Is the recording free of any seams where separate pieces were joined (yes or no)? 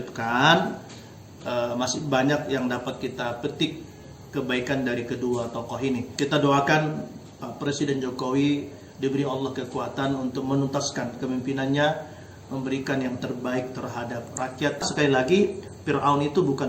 no